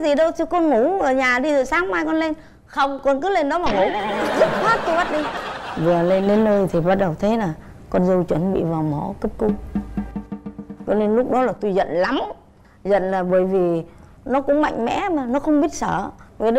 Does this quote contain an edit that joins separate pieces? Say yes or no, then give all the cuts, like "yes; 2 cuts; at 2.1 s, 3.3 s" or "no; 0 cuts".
no; 0 cuts